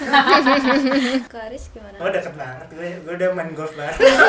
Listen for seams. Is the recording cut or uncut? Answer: cut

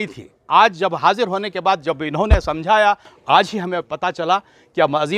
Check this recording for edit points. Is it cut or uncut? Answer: cut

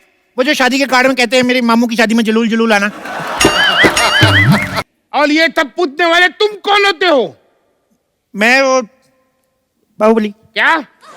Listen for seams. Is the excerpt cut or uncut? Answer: cut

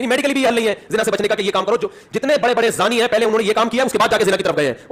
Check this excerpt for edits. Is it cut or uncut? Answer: uncut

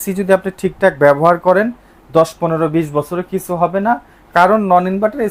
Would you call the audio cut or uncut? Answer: uncut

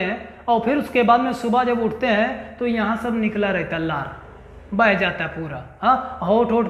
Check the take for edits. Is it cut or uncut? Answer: uncut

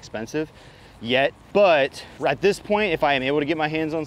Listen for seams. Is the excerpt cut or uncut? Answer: cut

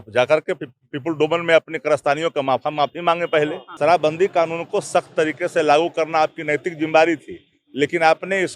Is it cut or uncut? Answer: cut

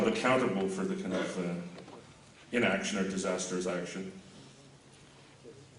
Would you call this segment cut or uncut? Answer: uncut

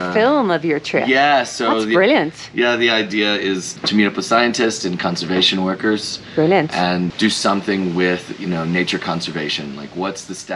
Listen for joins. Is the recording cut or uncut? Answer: cut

